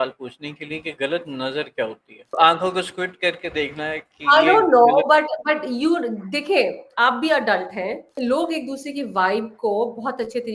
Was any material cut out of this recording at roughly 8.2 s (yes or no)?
yes